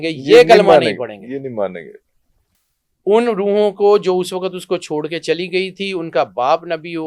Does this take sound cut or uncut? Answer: uncut